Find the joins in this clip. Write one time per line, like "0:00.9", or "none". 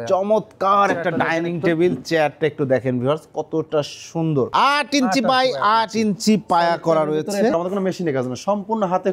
0:04.5
0:07.5